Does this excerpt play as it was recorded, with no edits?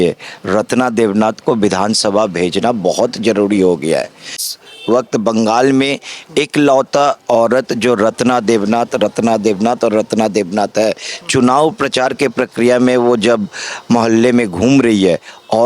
no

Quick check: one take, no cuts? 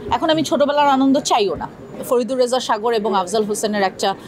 no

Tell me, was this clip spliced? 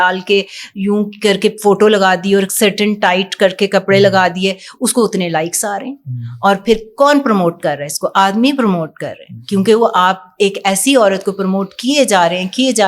no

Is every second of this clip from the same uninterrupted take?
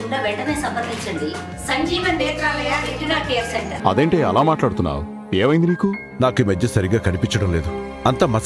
no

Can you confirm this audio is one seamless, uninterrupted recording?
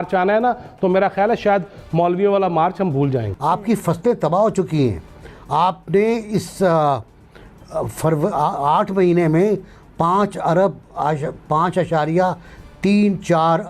no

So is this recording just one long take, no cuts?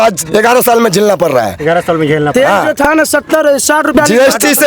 yes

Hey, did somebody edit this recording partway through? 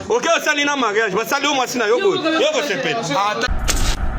no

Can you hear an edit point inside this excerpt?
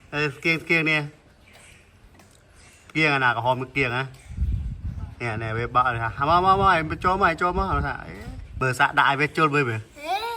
yes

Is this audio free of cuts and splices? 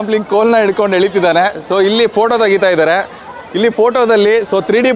yes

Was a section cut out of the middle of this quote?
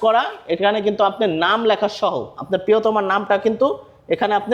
no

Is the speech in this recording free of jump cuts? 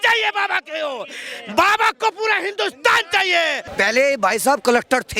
no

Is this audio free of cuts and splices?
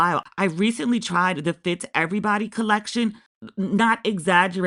yes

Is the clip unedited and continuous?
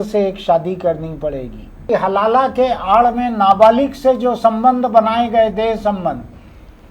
no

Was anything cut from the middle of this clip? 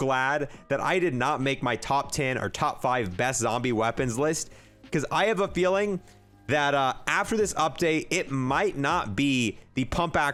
no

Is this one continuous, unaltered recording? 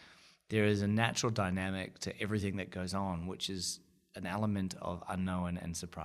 yes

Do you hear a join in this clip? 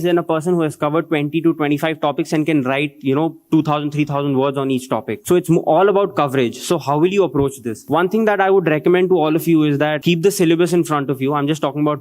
yes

